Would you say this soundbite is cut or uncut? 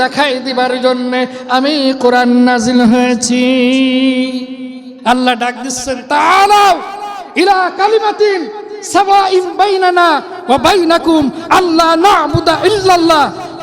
cut